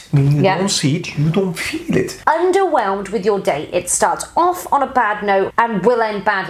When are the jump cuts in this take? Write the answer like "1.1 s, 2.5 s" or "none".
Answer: 2.1 s, 5.5 s